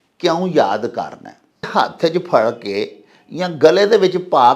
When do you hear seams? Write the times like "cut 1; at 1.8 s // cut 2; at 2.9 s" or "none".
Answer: cut 1; at 1.7 s